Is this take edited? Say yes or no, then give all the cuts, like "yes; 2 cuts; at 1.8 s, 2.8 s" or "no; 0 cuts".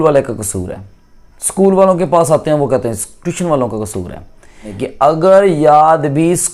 yes; 1 cut; at 4.8 s